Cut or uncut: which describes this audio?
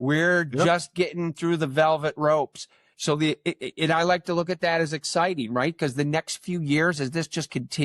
uncut